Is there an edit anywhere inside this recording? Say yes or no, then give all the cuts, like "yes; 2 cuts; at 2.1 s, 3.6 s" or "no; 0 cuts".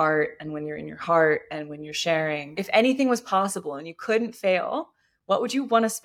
yes; 1 cut; at 2.5 s